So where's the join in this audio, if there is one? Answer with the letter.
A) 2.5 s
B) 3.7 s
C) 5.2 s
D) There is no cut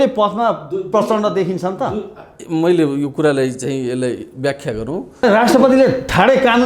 C